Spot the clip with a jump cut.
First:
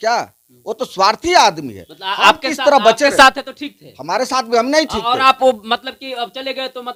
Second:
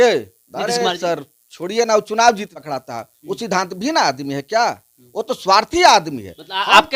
second; 1 cut; at 2.5 s

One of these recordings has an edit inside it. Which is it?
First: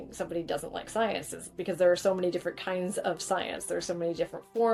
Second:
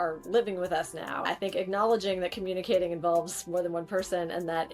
second; 1 cut; at 1.2 s

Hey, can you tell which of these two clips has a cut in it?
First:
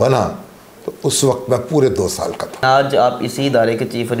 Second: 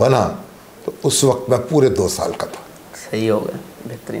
first; 1 cut; at 2.6 s

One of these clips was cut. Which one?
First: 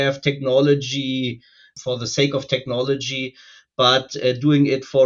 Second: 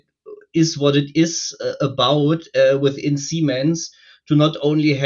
first; 1 cut; at 1.7 s

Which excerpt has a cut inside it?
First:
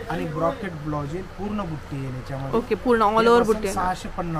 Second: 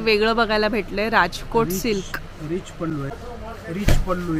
second; 1 cut; at 2.9 s

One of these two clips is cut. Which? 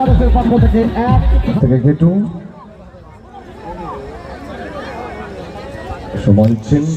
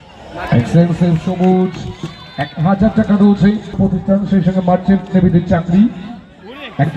first; 1 cut; at 1.6 s

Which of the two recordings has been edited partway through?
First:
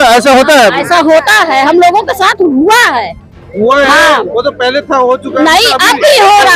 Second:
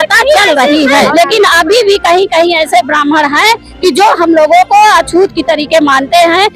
second; 1 cut; at 1.1 s

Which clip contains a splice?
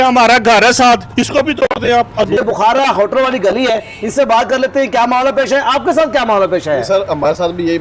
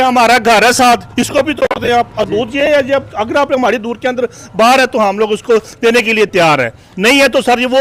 first; 1 cut; at 2.4 s

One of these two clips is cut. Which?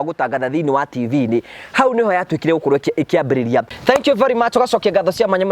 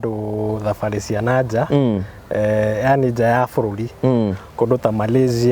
first; 1 cut; at 3.7 s

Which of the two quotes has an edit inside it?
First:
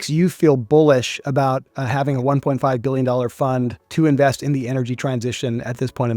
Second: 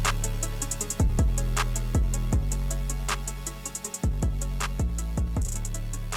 first; 1 cut; at 3.8 s

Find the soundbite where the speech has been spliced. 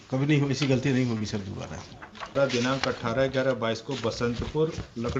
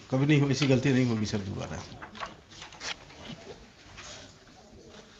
first; 1 cut; at 2.4 s

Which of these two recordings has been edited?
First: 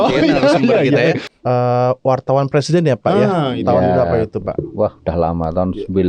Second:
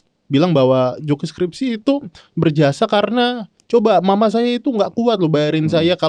first; 1 cut; at 1.2 s

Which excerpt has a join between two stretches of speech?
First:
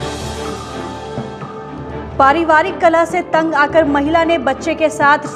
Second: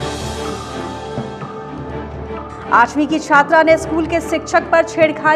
first; 1 cut; at 2.0 s

